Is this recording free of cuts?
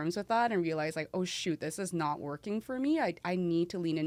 yes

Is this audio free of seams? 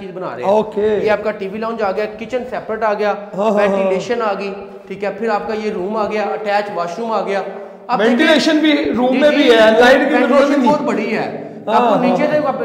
yes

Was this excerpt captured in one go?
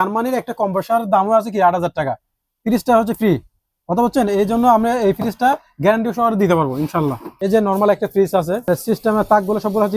no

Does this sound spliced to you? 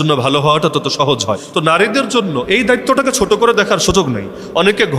no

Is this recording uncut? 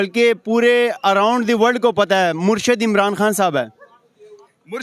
yes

